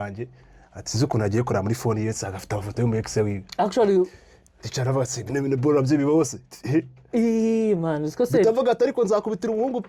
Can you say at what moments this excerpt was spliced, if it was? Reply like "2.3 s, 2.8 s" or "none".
none